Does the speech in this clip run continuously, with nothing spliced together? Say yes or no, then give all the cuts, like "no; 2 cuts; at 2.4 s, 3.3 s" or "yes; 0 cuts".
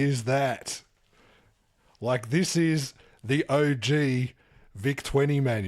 yes; 0 cuts